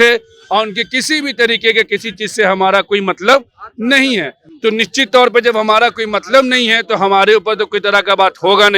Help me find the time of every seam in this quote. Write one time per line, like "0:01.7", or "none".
none

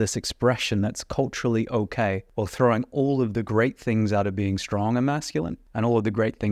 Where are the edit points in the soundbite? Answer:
0:02.3
0:05.6

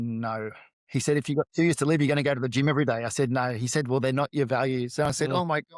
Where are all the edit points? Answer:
none

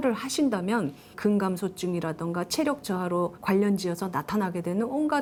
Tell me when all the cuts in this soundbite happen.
none

